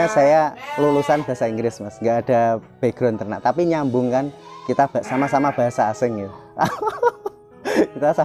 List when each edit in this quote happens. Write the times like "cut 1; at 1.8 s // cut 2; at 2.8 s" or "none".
none